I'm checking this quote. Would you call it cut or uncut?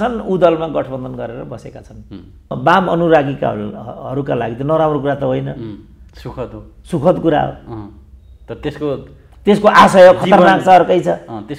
cut